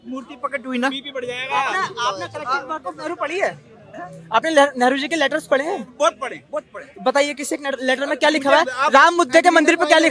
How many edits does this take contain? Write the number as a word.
zero